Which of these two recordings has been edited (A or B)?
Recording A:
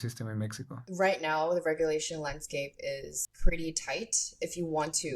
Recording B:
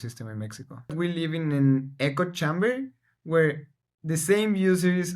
B